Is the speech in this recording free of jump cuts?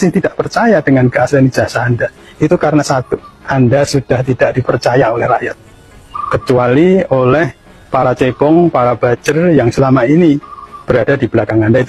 yes; 0 cuts

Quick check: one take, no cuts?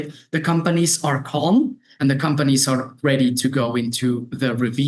yes; 0 cuts

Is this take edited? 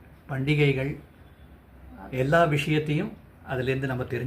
no; 0 cuts

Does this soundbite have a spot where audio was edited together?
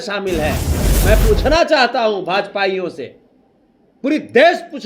no; 0 cuts

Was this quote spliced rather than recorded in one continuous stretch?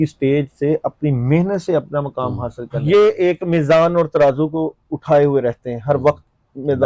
yes; 1 cut; at 2.8 s

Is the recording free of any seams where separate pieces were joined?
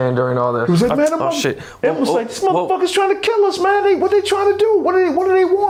yes; 0 cuts

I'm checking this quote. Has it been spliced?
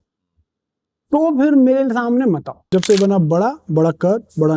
yes; 1 cut; at 2.7 s

